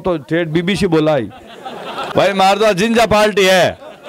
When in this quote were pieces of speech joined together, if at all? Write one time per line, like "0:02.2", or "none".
0:02.1